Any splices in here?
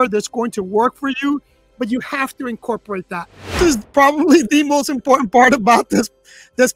yes; 1 cut; at 3.6 s

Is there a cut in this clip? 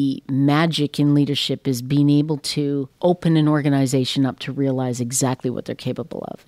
yes; 1 cut; at 2.9 s

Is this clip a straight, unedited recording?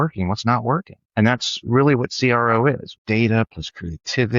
no; 2 cuts; at 1.0 s, 2.9 s

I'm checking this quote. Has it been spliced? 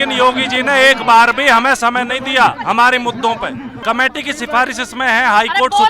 yes; 1 cut; at 3.7 s

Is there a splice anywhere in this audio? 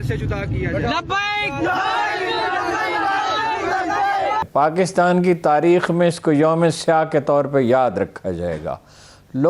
yes; 1 cut; at 4.5 s

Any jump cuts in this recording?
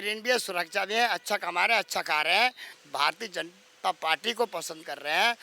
yes; 1 cut; at 2.7 s

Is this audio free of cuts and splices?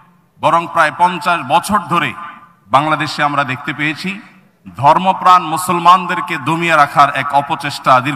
yes; 0 cuts

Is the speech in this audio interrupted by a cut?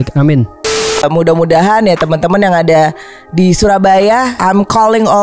yes; 2 cuts; at 1.0 s, 4.3 s

